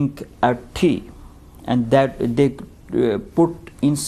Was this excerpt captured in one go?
no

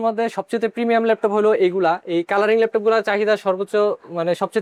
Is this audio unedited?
yes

